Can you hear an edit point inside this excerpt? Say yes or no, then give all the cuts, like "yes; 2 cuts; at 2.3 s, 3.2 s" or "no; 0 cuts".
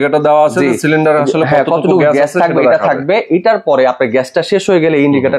no; 0 cuts